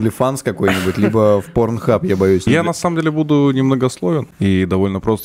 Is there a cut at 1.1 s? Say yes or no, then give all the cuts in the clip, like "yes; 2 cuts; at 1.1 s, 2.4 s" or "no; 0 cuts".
no; 2 cuts; at 2.5 s, 4.3 s